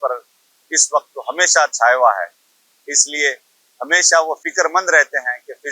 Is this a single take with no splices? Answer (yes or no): no